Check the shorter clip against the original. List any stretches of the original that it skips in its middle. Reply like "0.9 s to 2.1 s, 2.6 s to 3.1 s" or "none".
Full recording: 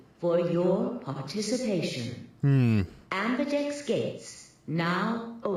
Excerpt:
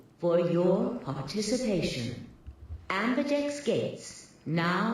2.5 s to 2.7 s

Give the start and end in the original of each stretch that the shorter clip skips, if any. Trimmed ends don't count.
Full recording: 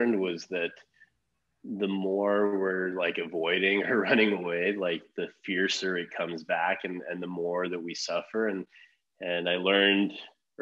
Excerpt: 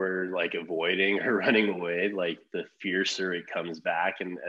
none

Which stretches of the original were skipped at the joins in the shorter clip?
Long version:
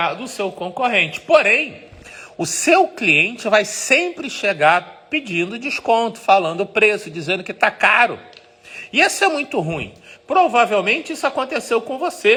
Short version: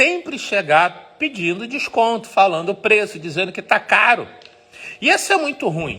none

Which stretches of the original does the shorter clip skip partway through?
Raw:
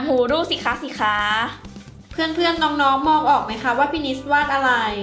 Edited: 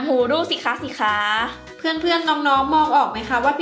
1.6 s to 2.0 s

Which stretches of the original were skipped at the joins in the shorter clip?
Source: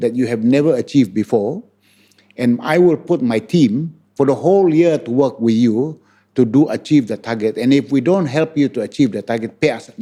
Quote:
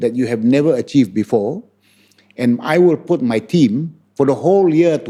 none

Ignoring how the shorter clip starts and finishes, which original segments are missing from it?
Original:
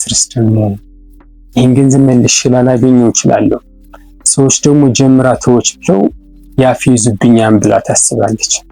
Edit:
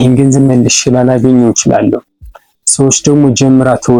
none

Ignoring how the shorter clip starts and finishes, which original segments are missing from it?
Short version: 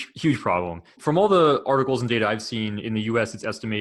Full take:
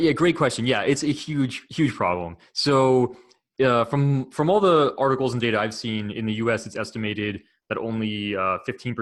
2.5 s to 4.3 s

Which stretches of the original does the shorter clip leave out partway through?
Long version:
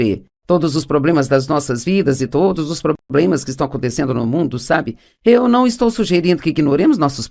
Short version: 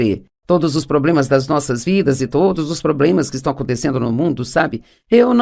3.0 s to 3.1 s

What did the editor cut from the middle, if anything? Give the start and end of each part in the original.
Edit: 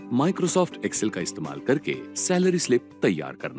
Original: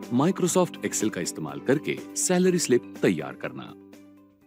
none

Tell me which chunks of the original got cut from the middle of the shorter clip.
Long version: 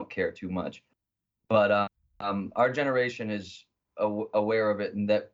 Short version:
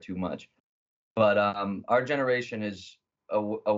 1.9 s to 2.3 s

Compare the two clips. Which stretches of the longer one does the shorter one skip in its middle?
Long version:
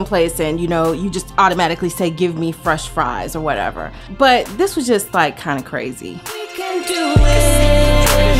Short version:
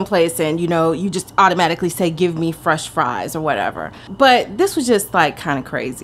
none

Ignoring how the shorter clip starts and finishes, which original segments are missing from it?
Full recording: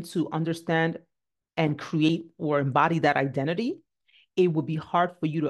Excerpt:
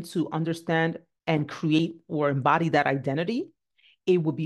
1.1 s to 1.4 s

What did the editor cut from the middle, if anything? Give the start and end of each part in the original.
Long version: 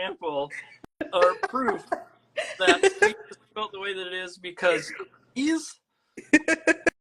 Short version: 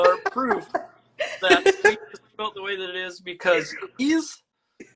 5.0 s to 5.2 s

